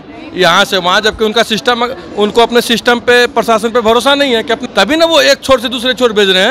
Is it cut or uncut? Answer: cut